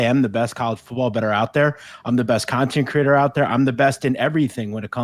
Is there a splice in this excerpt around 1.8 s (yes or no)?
no